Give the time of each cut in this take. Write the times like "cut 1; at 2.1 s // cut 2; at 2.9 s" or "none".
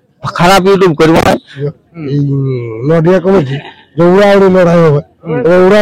cut 1; at 1.6 s